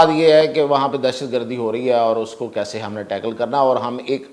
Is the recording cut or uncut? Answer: uncut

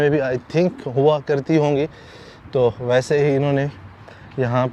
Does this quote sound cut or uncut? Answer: uncut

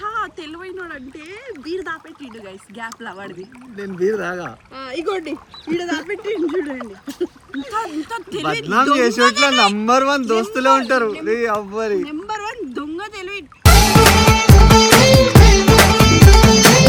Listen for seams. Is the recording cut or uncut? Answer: uncut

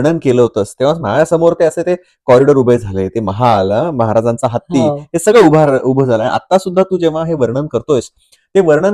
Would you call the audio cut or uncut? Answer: uncut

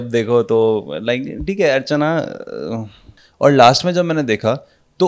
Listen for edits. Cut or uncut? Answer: cut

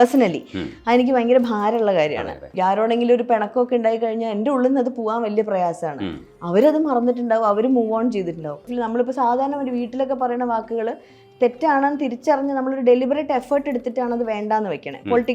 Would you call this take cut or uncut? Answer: cut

